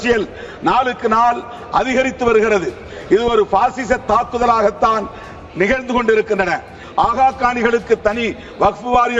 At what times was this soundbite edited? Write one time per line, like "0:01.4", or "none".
0:06.8